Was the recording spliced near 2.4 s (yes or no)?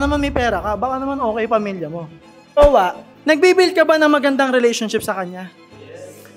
yes